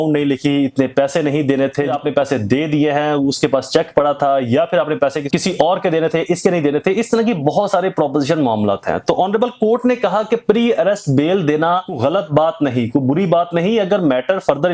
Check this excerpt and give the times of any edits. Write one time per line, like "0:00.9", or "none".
0:01.9
0:05.2
0:11.9